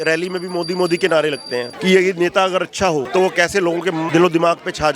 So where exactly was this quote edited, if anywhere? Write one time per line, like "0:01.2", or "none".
0:01.7
0:03.1
0:04.1